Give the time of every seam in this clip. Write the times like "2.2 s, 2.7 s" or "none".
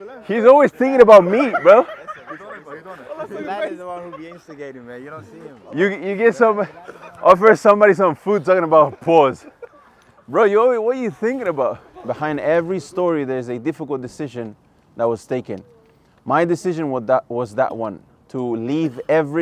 11.9 s